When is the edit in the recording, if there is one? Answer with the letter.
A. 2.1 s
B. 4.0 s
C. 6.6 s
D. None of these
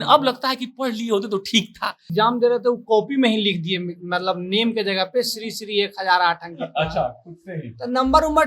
A